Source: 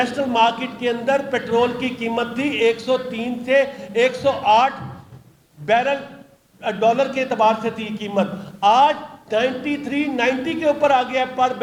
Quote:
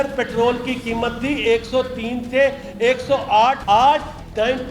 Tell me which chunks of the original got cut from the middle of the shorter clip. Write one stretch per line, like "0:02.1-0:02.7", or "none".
0:04.8-0:08.6